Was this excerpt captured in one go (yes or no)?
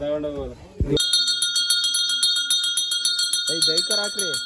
yes